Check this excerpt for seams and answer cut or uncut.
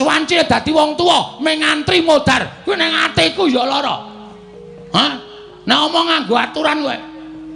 uncut